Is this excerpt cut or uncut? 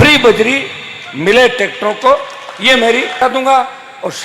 cut